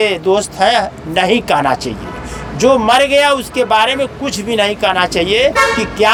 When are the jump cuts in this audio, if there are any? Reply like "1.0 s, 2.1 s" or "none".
none